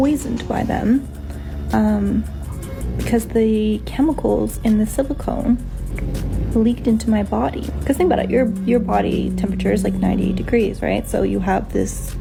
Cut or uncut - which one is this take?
uncut